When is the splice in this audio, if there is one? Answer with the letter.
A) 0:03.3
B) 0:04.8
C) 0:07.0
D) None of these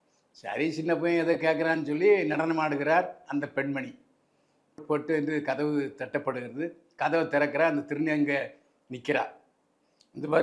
B